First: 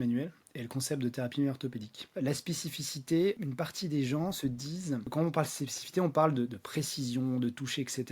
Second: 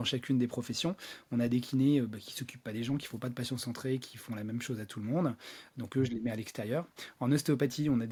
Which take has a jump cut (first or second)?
first